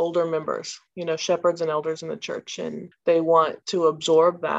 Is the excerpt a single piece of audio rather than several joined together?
no; 2 cuts; at 2.9 s, 3.6 s

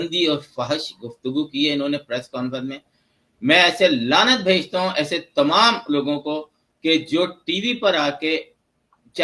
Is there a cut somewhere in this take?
no; 0 cuts

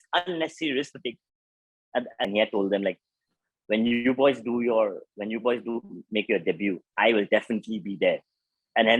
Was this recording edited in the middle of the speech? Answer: yes; 1 cut; at 2.3 s

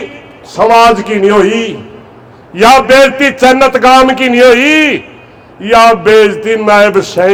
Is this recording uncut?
yes; 0 cuts

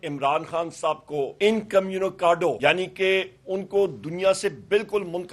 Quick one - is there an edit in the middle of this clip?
yes; 2 cuts; at 1.3 s, 2.6 s

